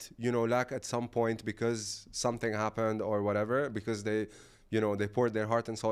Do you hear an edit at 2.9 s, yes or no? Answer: no